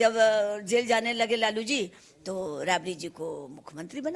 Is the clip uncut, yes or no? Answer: yes